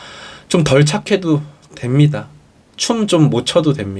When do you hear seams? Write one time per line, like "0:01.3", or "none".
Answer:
none